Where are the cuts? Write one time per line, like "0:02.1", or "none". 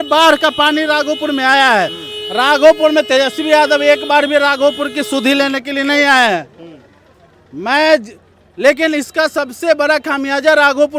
none